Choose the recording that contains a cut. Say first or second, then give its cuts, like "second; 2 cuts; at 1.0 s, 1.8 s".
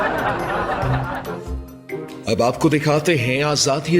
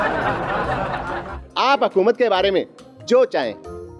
second; 1 cut; at 1.4 s